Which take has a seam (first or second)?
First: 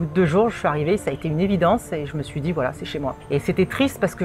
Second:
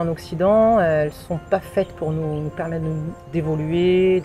first